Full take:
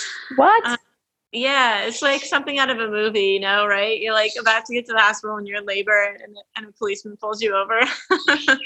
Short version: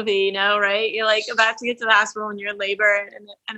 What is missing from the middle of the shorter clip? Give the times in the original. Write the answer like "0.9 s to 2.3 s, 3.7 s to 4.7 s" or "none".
none